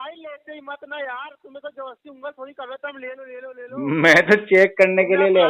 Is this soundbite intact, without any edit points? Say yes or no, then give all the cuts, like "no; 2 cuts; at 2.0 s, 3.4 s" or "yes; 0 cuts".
yes; 0 cuts